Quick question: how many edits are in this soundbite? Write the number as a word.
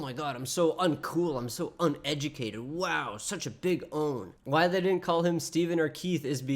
one